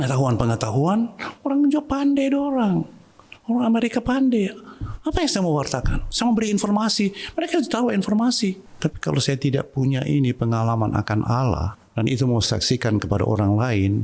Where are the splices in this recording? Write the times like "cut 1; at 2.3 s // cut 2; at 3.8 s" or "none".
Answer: cut 1; at 8.7 s // cut 2; at 11.8 s